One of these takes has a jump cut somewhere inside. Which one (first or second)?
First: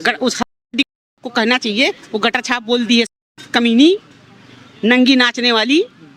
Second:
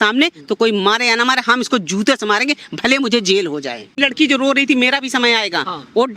second